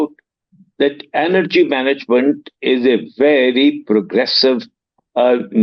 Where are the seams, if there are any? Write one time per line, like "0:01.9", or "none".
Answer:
none